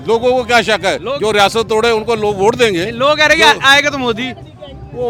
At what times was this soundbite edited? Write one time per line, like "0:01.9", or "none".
none

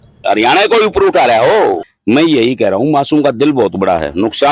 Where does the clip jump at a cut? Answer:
0:01.9

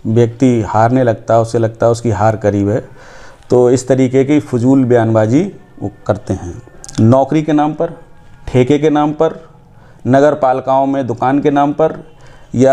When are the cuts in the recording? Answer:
0:06.8

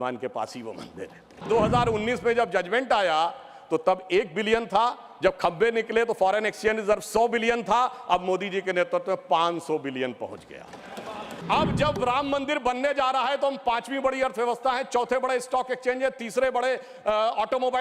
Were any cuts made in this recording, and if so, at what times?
0:01.4
0:11.4

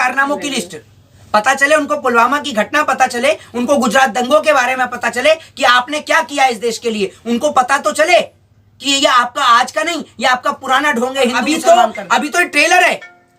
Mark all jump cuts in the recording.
0:11.4

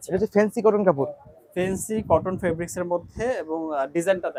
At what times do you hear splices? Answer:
none

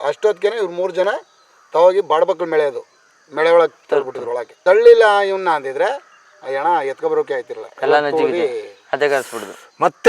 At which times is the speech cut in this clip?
0:04.5

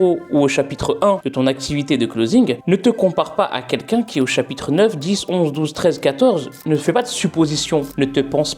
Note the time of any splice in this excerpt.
0:01.3
0:06.6

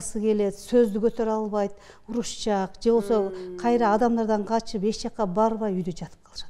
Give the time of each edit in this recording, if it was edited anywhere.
none

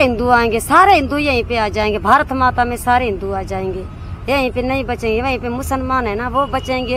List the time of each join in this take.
none

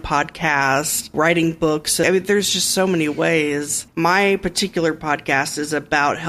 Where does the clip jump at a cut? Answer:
0:01.1
0:02.0
0:03.8

